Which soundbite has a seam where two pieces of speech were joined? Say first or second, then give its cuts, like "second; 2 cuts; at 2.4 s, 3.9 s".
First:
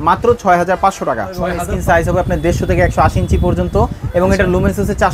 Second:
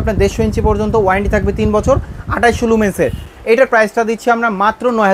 first; 1 cut; at 1.6 s